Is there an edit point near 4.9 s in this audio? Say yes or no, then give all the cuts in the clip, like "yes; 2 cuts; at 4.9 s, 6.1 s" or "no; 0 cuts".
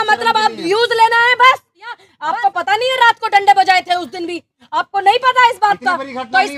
no; 1 cut; at 2.1 s